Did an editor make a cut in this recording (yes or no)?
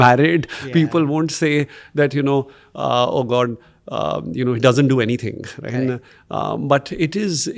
no